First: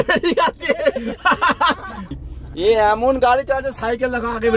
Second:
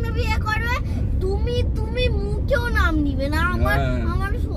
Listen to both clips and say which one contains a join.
first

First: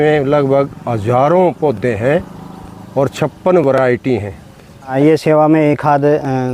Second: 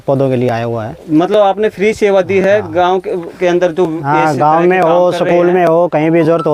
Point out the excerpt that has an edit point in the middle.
first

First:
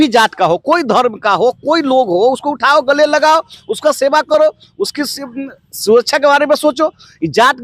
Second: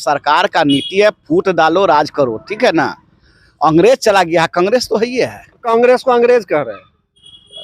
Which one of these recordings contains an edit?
second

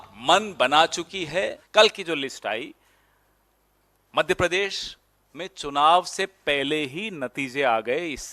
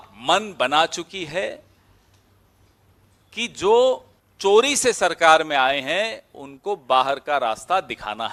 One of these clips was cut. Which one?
first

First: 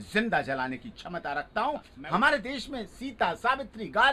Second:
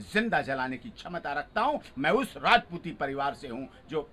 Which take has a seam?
first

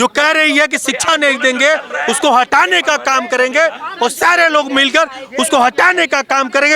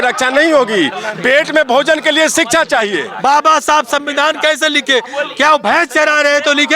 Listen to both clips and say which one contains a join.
second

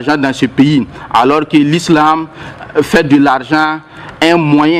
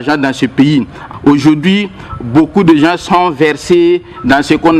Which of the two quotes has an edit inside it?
second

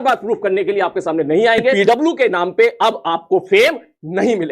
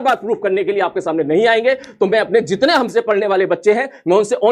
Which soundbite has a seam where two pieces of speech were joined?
first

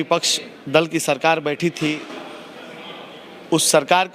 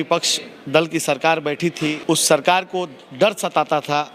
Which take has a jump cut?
second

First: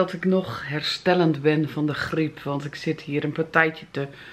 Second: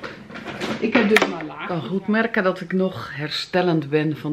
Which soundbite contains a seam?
second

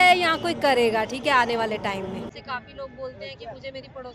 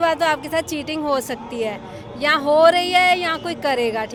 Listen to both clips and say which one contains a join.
first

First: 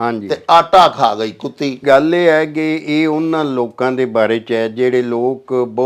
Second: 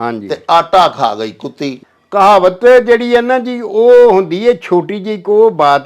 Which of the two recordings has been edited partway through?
second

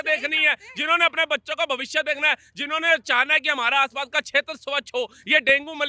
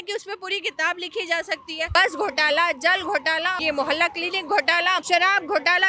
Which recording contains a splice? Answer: second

